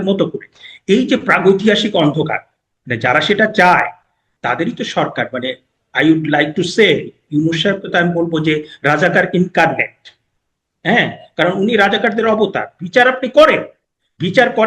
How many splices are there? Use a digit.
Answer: 1